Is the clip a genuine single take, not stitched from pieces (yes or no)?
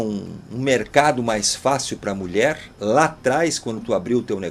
yes